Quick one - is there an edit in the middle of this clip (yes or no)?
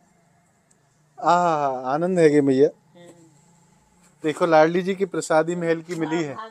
no